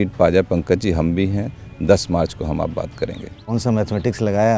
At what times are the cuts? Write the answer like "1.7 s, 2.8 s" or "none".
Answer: 3.4 s